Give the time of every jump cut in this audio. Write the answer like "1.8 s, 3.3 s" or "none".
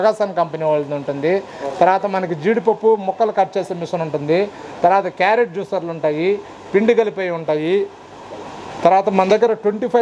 none